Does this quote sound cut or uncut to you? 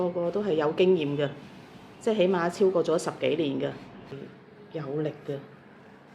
cut